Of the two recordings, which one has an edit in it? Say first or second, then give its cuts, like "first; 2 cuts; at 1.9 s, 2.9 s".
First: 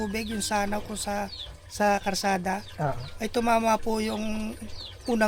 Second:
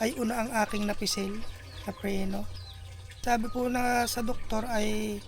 second; 1 cut; at 3.2 s